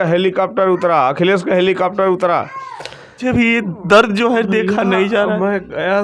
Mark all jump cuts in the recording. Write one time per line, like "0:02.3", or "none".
0:03.2